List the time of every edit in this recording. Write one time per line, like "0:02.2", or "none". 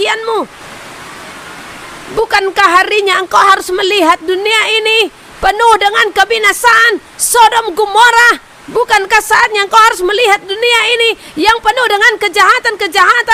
none